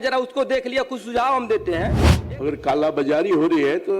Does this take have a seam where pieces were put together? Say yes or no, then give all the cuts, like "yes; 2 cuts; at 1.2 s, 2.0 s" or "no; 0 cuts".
yes; 1 cut; at 2.1 s